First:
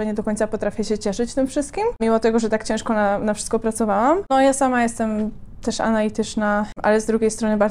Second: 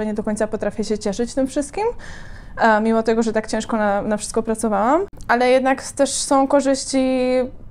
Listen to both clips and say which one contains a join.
first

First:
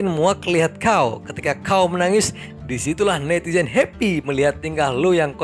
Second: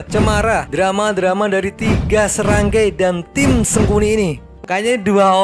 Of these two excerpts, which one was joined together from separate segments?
second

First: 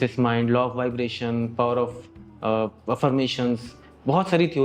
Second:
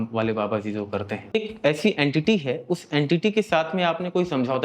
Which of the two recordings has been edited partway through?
second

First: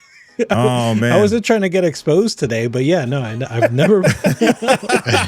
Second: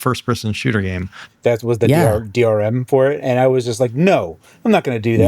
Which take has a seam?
second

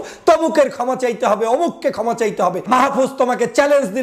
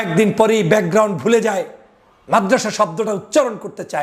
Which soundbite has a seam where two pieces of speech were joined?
first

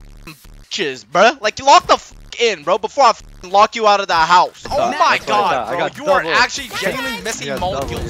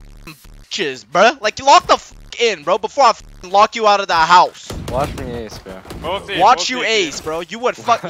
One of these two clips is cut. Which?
first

